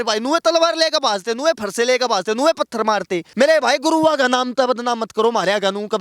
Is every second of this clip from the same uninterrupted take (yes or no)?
no